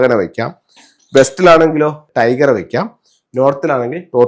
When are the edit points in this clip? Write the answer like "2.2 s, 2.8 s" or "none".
2.0 s

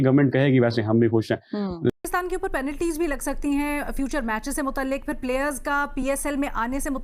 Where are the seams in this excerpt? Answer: 1.9 s

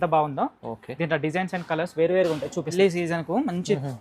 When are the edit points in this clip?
2.7 s

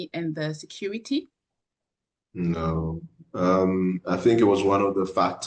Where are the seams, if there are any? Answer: none

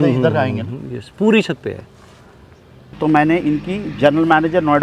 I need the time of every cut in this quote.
3.0 s

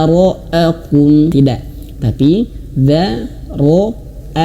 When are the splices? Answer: 1.3 s

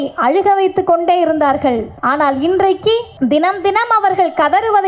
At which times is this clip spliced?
1.9 s, 3.1 s

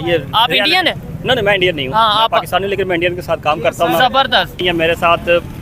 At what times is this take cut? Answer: 4.6 s

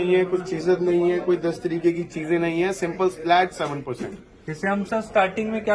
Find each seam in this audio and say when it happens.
none

